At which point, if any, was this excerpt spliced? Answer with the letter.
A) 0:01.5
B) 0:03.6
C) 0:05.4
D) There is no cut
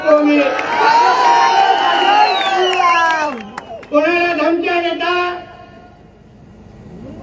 D